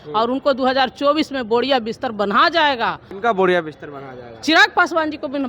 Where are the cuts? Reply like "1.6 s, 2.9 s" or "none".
3.1 s